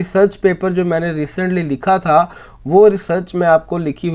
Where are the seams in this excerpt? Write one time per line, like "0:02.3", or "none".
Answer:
none